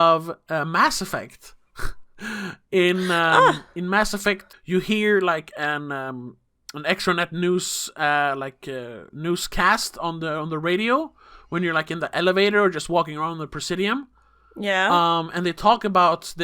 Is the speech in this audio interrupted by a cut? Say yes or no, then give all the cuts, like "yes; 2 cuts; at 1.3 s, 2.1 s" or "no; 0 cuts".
yes; 2 cuts; at 4.5 s, 9.0 s